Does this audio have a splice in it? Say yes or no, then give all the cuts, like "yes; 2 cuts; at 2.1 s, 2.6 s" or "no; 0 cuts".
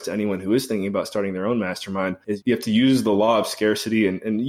yes; 1 cut; at 2.3 s